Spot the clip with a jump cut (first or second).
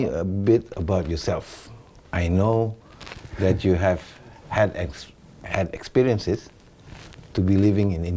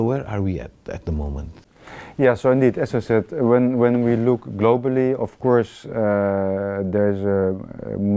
second